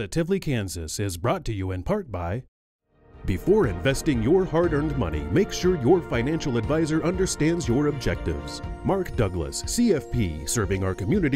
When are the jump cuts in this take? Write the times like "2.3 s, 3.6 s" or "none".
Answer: 2.6 s